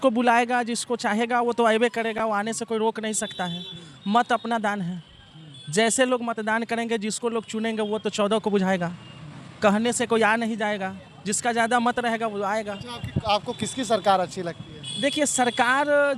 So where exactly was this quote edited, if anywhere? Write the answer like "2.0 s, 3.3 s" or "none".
none